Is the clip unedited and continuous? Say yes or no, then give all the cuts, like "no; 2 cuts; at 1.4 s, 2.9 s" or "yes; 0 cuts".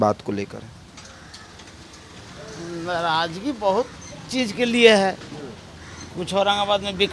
yes; 0 cuts